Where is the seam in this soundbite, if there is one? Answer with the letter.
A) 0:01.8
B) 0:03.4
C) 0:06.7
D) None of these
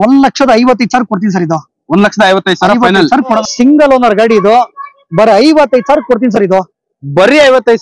B